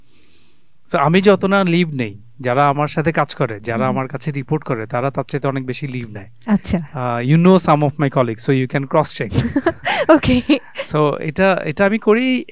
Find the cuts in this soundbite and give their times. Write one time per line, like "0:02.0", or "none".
none